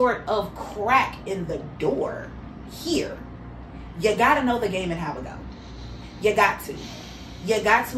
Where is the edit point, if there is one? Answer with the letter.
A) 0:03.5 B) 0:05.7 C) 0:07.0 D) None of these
D